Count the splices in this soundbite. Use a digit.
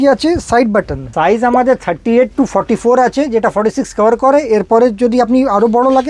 1